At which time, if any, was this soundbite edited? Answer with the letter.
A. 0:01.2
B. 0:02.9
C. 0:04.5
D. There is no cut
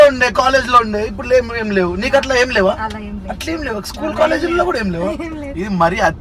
A